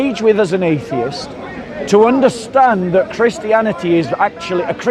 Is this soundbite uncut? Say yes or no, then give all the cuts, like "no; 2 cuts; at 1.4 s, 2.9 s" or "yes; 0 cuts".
yes; 0 cuts